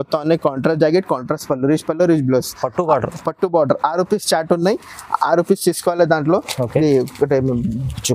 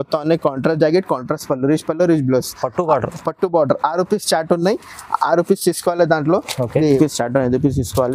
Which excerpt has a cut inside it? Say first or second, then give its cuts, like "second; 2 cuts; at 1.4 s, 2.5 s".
second; 1 cut; at 7.0 s